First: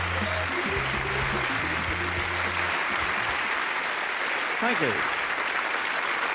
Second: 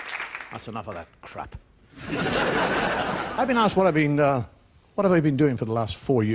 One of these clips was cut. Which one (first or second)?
second